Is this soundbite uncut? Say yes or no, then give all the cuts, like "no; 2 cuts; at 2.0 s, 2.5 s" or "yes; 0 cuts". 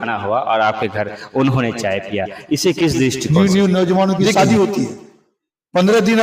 no; 1 cut; at 3.2 s